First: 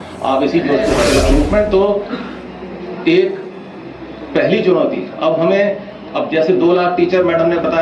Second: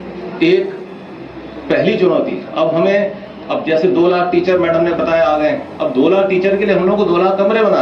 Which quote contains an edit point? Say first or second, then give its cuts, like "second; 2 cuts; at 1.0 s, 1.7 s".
first; 1 cut; at 1.1 s